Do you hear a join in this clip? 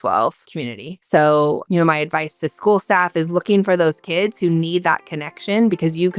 yes; 1 cut; at 1.6 s

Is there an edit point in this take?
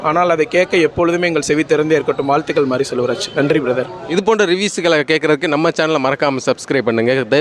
no; 0 cuts

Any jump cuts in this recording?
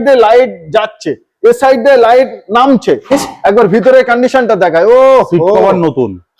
yes; 1 cut; at 3.1 s

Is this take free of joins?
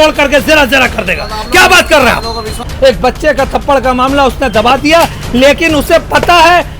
no; 1 cut; at 2.7 s

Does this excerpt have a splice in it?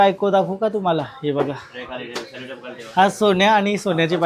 no; 0 cuts

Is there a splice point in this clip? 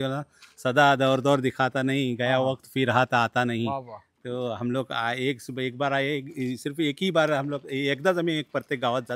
no; 0 cuts

